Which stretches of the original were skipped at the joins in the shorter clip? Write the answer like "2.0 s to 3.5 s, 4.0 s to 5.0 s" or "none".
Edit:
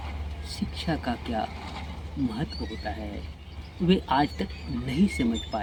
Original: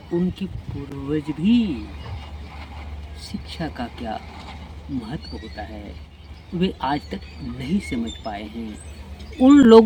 none